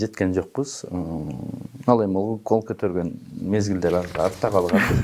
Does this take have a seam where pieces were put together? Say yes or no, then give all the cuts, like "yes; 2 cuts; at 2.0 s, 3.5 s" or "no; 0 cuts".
no; 0 cuts